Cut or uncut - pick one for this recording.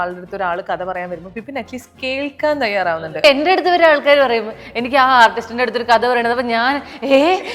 cut